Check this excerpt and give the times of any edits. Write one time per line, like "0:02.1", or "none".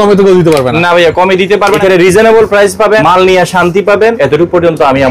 0:01.7
0:03.0
0:04.2